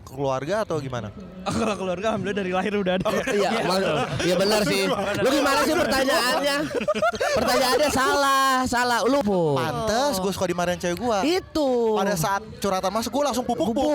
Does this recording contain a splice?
yes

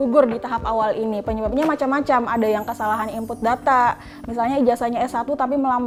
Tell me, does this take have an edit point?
no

